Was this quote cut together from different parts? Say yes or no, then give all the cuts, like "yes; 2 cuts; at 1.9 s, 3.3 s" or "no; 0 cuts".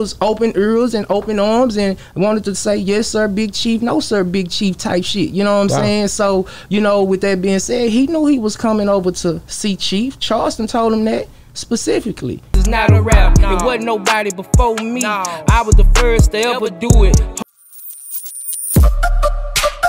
yes; 1 cut; at 17.4 s